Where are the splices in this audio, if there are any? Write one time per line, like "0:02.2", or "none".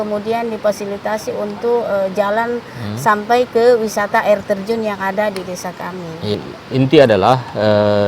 0:06.4